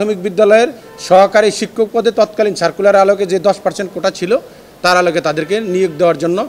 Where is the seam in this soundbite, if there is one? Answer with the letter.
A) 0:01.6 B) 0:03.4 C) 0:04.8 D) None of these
D